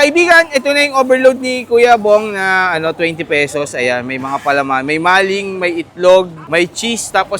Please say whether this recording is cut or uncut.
cut